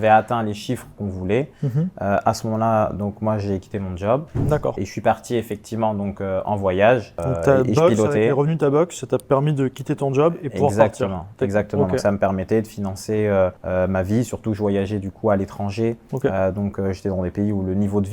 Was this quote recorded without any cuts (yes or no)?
yes